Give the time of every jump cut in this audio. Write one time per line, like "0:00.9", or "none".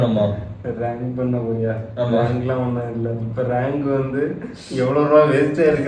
none